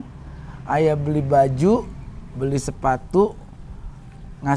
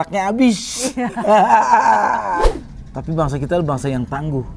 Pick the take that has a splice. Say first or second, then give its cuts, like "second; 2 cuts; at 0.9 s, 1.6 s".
second; 1 cut; at 2.5 s